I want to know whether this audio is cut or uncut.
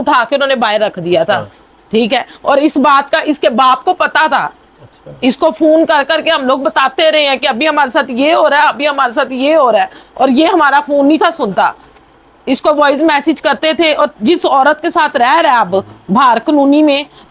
uncut